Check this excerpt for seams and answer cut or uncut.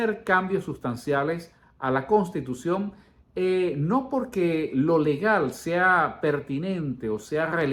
uncut